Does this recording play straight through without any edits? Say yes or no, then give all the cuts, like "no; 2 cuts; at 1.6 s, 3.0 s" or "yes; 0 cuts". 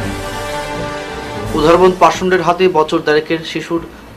no; 1 cut; at 1.1 s